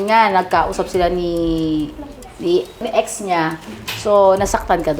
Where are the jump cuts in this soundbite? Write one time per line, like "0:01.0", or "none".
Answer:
0:02.9